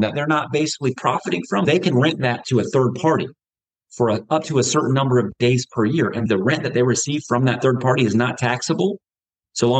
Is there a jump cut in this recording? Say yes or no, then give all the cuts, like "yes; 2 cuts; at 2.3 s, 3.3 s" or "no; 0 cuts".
yes; 2 cuts; at 1.6 s, 6.3 s